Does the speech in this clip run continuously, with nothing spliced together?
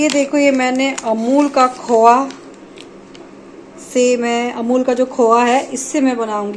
yes; 0 cuts

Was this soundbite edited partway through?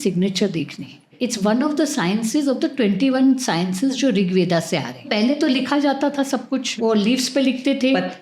yes; 3 cuts; at 1.1 s, 5.0 s, 6.7 s

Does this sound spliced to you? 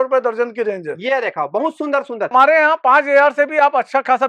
yes; 1 cut; at 2.3 s

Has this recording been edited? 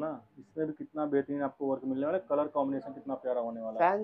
no; 0 cuts

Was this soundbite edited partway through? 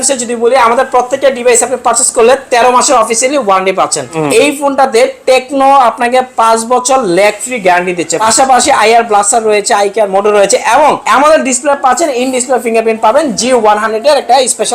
yes; 3 cuts; at 4.1 s, 8.2 s, 11.0 s

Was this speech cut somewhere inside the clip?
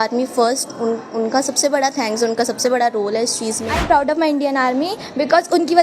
yes; 1 cut; at 3.7 s

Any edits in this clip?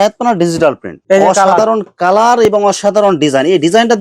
yes; 1 cut; at 1.0 s

